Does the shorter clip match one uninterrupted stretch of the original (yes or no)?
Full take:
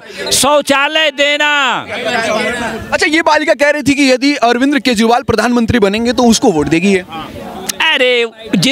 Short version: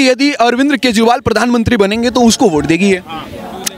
yes